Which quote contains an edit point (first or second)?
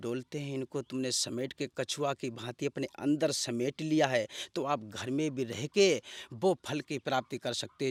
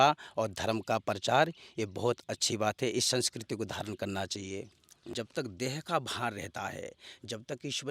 second